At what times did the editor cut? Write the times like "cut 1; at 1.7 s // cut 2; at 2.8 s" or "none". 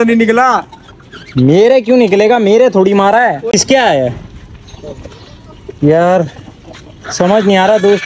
none